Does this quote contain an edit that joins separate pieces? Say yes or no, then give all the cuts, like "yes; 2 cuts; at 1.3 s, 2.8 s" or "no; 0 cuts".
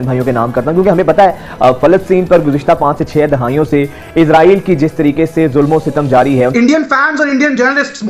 yes; 1 cut; at 6.8 s